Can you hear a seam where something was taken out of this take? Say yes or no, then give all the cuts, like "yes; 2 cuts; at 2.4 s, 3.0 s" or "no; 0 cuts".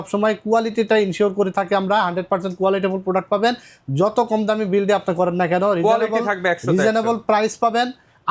no; 0 cuts